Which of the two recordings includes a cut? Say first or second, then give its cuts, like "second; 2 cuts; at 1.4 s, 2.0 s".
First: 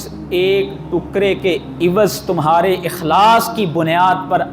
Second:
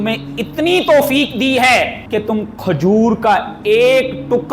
second; 1 cut; at 2.0 s